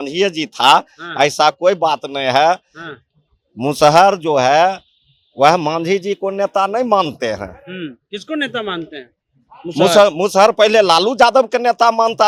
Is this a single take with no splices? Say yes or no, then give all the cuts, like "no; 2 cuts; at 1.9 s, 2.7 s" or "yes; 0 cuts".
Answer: yes; 0 cuts